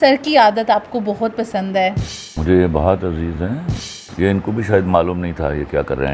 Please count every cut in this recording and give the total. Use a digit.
2